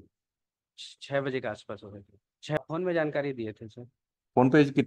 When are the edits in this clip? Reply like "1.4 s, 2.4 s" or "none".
2.6 s